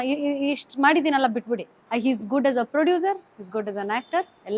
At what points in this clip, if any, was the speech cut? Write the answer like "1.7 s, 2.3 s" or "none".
1.8 s